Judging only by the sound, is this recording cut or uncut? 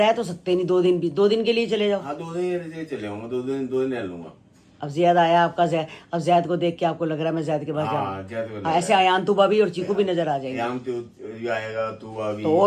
uncut